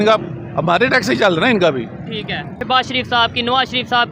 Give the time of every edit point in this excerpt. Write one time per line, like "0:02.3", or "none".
0:02.5